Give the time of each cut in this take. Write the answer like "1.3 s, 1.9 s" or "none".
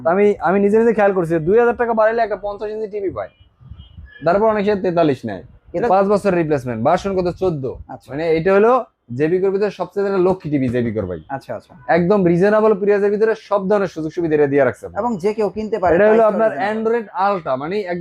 5.8 s